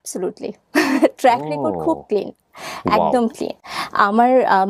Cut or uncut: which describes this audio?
uncut